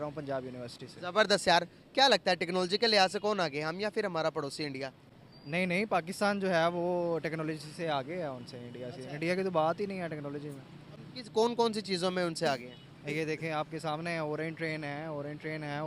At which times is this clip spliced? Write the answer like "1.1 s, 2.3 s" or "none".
none